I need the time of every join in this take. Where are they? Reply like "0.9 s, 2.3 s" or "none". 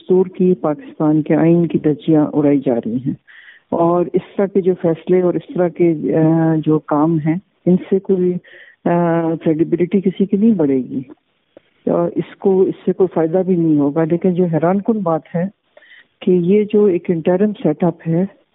none